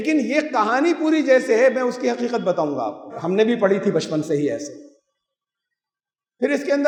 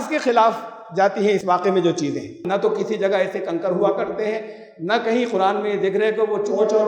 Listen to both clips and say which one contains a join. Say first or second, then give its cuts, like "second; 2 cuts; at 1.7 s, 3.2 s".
second; 1 cut; at 2.4 s